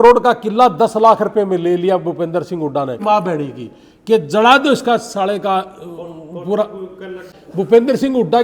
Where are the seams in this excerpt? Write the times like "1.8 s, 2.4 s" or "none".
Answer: 3.0 s, 7.4 s

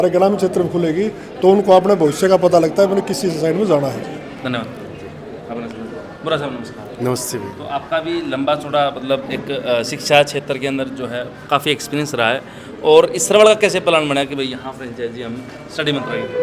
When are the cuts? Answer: none

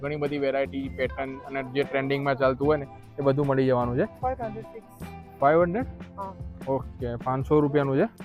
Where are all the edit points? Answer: 4.2 s

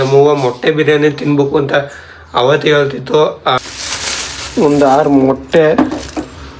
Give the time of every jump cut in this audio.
3.6 s

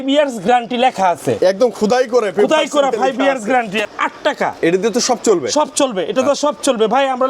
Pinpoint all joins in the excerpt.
3.8 s

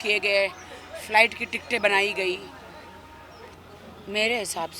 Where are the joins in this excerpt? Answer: 3.5 s

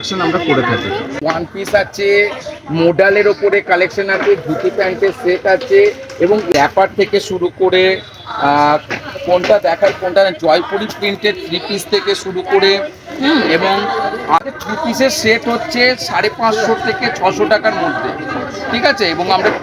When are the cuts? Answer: 1.2 s, 6.5 s, 14.5 s

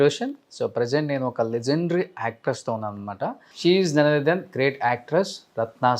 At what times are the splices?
3.5 s

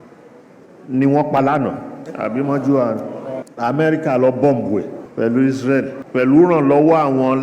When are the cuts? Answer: 3.4 s, 5.0 s, 6.0 s

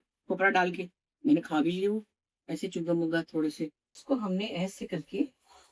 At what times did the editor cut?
3.9 s

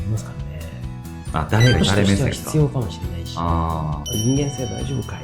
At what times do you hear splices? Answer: 4.0 s

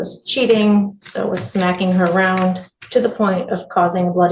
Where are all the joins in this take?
none

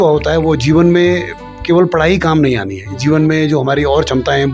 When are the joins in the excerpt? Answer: none

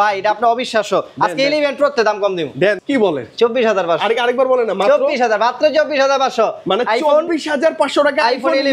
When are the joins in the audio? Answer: 2.8 s

